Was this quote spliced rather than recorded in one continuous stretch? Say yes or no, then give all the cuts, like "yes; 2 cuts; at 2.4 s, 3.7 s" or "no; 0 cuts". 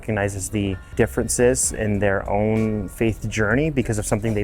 yes; 1 cut; at 0.9 s